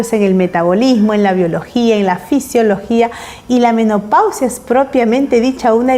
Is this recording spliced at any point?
no; 0 cuts

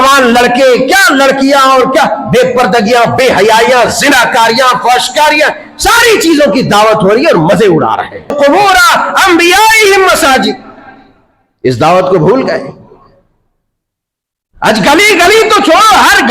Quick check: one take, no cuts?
no; 1 cut; at 8.3 s

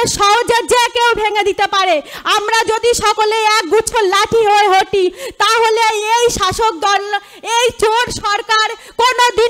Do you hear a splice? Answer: no; 0 cuts

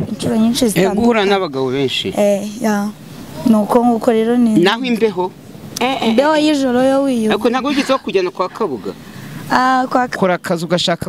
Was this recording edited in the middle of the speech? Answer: yes; 1 cut; at 10.1 s

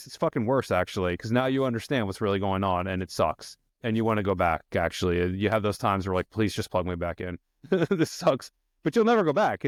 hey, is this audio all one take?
yes; 0 cuts

